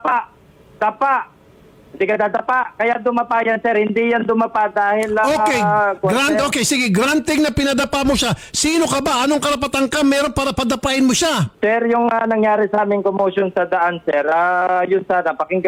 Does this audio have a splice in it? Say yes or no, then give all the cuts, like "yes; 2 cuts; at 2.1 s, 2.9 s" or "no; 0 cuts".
no; 0 cuts